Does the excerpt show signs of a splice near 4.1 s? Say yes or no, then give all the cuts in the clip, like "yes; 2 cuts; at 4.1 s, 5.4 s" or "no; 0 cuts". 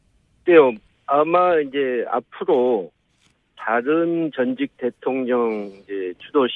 no; 1 cut; at 1.4 s